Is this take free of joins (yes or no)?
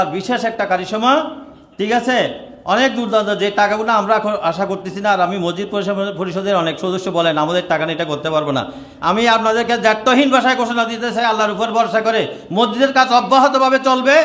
yes